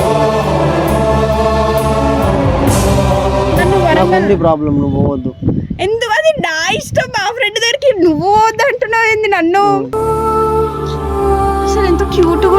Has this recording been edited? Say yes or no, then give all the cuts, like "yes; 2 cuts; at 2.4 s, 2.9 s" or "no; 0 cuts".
yes; 1 cut; at 3.6 s